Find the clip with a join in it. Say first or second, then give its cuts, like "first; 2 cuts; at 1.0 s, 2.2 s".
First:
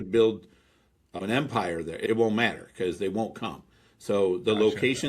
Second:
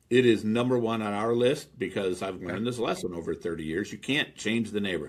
first; 1 cut; at 1.1 s